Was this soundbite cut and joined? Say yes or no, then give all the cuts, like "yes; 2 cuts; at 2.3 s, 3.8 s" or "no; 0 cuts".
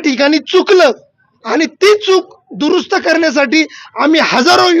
no; 0 cuts